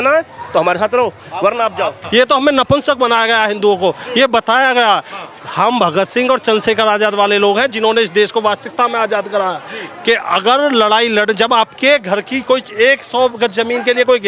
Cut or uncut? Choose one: cut